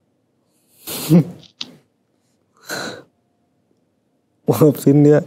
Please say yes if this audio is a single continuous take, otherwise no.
yes